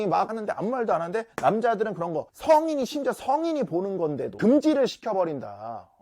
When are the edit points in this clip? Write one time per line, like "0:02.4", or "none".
none